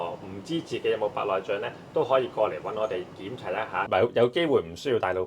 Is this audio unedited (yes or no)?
no